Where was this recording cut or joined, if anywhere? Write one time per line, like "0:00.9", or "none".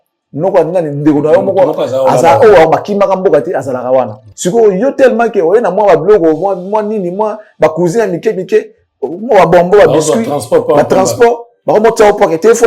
0:04.2